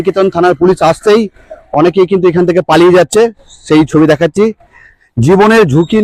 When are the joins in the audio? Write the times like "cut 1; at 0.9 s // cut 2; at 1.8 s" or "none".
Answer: none